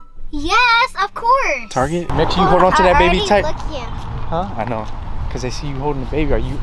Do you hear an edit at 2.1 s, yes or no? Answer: yes